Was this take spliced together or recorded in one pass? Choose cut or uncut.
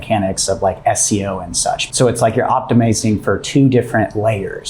cut